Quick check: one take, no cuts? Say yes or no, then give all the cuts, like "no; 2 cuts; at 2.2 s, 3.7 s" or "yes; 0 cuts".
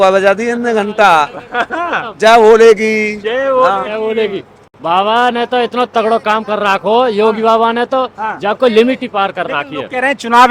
yes; 0 cuts